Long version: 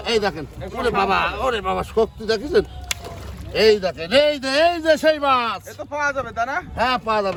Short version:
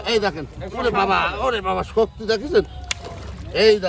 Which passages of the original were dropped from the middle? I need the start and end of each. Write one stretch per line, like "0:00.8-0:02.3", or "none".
none